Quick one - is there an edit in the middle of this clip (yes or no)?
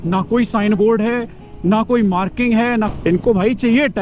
yes